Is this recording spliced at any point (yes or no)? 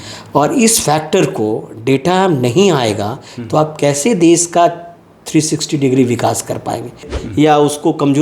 yes